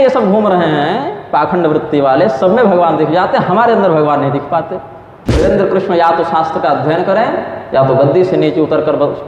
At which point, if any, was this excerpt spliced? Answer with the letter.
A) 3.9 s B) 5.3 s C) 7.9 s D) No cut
B